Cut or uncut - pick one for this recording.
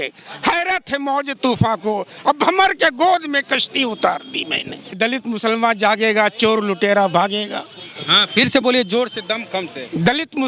cut